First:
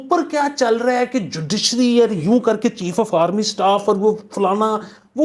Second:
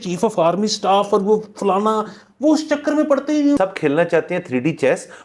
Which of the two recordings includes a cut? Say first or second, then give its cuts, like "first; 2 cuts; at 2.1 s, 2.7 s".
second; 1 cut; at 3.6 s